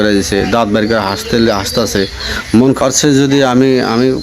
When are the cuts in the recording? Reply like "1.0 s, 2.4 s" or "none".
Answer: 2.8 s